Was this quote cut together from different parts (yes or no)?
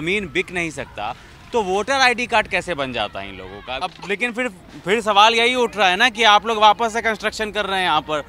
yes